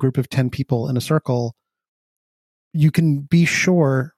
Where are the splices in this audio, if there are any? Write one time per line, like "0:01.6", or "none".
0:02.6